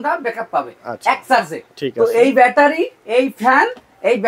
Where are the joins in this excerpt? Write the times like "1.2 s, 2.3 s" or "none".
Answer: none

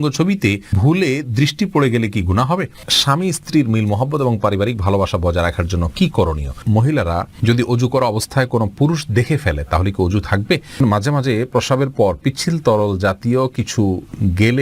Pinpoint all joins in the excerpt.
0.8 s, 2.9 s, 6.6 s, 10.8 s

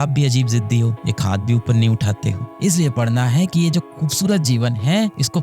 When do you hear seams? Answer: 2.4 s

